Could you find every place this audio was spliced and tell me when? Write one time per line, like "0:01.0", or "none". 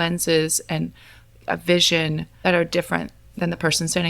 0:02.3